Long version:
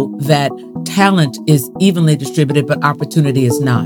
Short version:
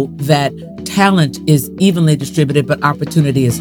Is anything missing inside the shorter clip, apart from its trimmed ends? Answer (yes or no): no